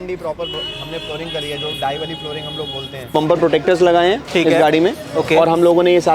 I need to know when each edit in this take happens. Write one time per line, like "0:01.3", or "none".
0:03.1